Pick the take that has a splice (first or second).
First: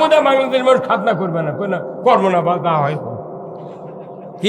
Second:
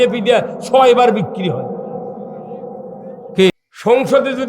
second